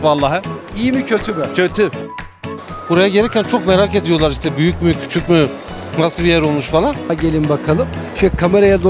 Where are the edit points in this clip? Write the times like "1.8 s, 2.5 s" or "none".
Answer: 2.3 s, 7.1 s